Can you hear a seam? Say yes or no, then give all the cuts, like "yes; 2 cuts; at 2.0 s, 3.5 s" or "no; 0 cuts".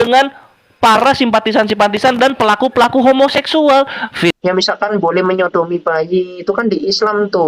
yes; 1 cut; at 4.3 s